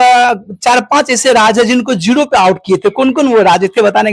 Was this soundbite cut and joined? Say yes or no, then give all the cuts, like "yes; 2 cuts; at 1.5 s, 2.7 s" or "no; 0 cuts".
no; 0 cuts